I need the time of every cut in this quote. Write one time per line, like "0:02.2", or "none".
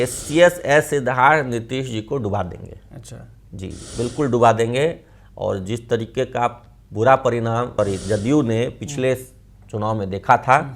0:07.7